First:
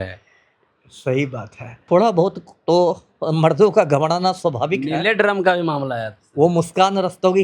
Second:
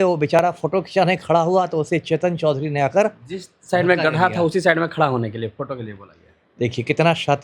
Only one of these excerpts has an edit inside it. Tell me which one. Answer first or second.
first